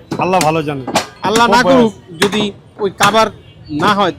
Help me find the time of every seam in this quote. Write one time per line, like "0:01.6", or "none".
0:01.1
0:02.7